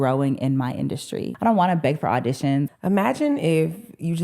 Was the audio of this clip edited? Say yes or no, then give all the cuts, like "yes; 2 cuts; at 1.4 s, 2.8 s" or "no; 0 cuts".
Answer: yes; 2 cuts; at 1.3 s, 2.7 s